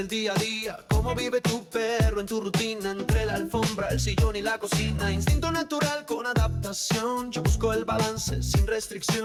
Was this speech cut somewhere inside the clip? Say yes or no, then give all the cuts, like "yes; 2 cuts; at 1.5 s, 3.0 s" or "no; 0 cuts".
no; 0 cuts